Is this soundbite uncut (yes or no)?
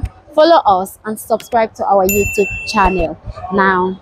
yes